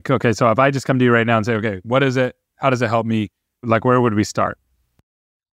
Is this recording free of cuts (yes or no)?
no